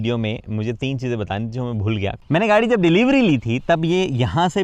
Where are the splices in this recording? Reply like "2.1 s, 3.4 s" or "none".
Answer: 2.2 s